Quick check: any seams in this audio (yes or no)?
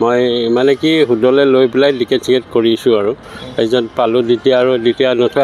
no